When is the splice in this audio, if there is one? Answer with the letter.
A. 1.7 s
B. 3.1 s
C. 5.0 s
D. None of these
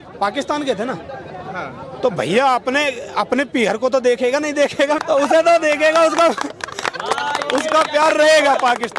C